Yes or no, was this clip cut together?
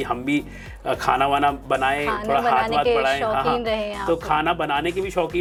no